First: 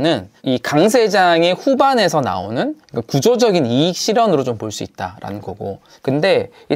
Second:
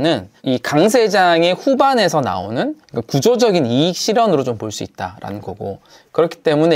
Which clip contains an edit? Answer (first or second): first